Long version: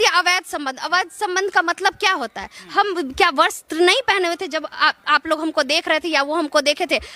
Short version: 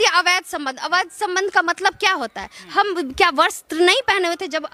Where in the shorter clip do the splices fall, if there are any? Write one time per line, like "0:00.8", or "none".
none

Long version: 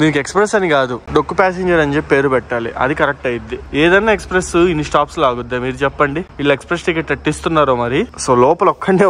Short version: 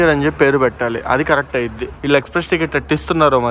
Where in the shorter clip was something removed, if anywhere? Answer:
0:01.9

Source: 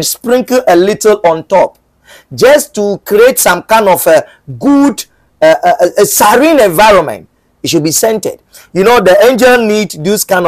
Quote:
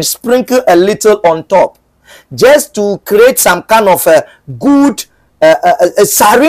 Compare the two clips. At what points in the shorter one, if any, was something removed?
none

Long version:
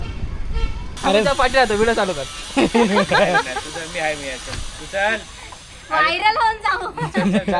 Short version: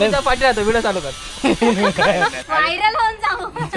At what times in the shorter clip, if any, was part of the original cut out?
0:02.4

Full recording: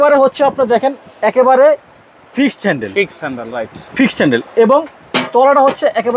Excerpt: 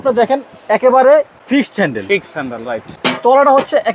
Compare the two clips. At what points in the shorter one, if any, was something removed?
0:01.4
0:02.9

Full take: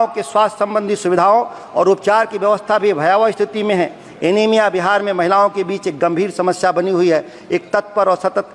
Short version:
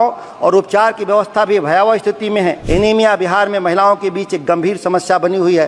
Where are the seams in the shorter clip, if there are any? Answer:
0:02.6

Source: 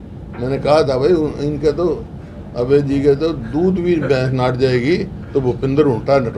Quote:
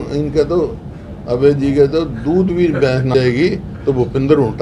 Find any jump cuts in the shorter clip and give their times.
0:03.1

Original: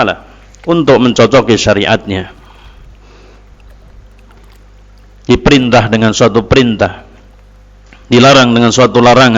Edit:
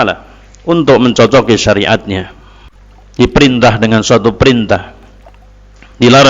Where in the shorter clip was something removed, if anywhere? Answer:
0:03.2

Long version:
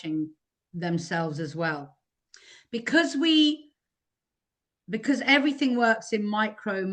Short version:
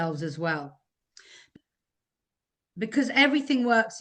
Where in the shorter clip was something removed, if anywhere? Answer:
0:01.6

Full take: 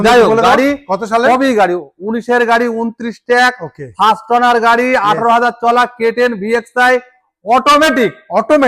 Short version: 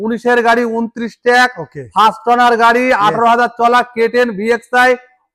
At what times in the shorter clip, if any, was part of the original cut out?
none

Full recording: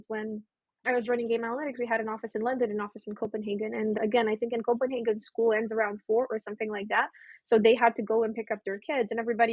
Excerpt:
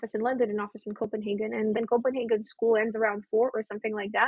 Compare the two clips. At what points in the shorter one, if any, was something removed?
0:01.8

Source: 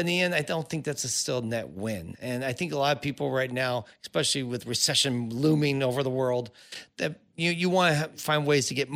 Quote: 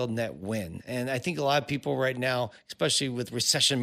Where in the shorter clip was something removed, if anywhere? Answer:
none

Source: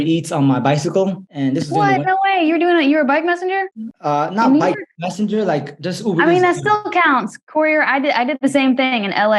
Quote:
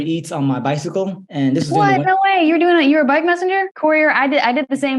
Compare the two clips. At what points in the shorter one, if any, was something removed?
0:03.7

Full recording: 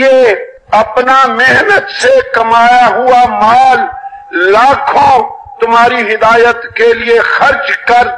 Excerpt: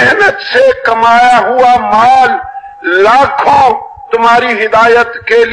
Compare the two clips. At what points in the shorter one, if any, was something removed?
none

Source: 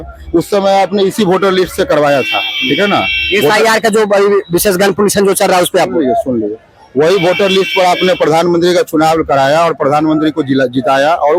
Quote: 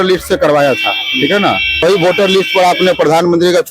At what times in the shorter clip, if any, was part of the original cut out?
0:01.8

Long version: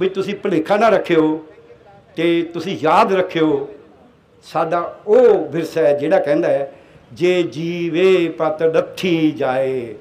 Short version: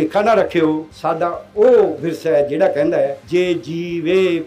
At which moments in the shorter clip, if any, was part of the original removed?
0:00.9
0:03.2

